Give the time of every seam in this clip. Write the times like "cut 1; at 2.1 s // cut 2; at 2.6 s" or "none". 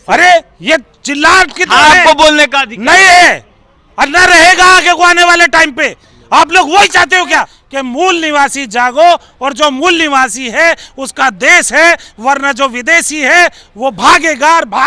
cut 1; at 7.6 s